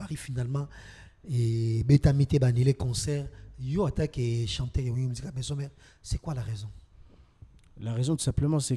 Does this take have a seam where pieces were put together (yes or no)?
no